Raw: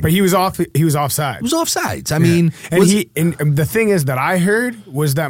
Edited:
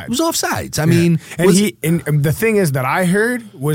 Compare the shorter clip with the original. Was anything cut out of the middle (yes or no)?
no